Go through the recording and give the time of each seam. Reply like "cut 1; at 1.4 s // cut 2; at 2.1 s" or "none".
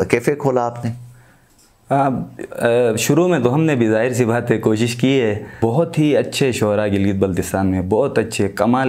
cut 1; at 5.5 s